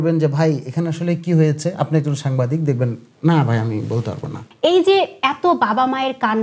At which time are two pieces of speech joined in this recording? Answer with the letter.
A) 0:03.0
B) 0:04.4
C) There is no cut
B